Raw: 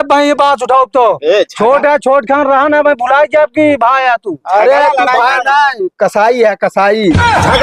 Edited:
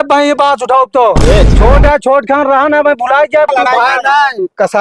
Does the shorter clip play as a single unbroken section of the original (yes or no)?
no